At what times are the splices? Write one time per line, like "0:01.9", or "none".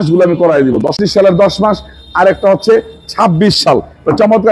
0:01.0